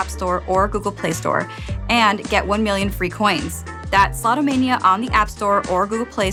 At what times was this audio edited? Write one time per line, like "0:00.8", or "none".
none